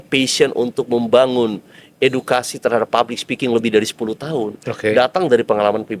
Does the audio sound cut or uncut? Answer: uncut